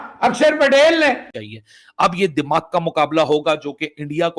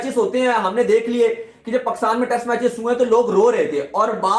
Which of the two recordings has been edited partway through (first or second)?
first